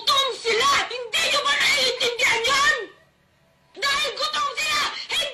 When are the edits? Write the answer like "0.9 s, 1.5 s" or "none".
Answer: none